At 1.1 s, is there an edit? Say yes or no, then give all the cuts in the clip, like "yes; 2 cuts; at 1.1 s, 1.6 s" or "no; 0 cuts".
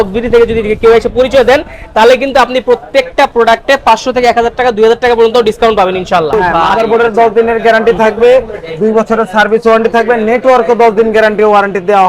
no; 1 cut; at 6.5 s